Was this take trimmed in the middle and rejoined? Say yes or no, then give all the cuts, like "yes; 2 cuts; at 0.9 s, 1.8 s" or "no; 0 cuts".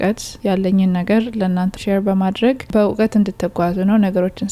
no; 0 cuts